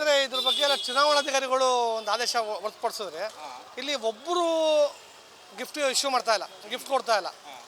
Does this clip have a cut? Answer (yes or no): no